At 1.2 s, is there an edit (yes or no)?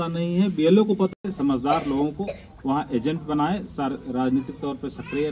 yes